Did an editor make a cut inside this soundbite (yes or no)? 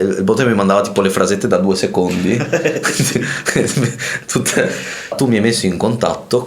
yes